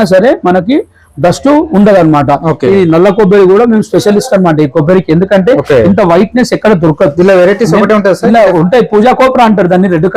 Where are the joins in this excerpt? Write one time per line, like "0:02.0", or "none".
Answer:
none